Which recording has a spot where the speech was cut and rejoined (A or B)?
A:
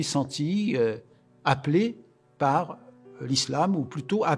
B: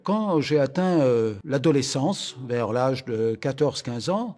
B